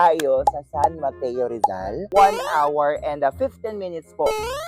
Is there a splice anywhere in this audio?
yes; 1 cut; at 2.0 s

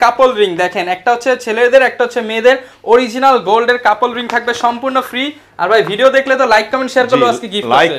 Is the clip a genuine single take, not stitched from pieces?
yes; 0 cuts

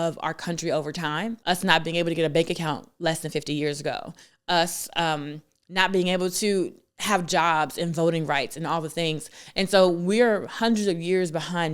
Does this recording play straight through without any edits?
no; 1 cut; at 1.4 s

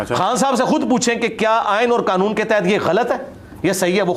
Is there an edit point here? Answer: no; 0 cuts

